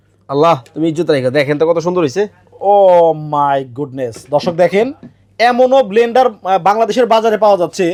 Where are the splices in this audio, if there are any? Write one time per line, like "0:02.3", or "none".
none